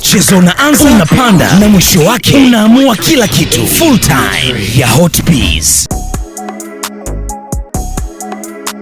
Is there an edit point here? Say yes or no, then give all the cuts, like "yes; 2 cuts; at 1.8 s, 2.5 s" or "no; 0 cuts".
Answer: yes; 2 cuts; at 5.7 s, 7.6 s